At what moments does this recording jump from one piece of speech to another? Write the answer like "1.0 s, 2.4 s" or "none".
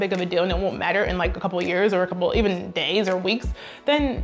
none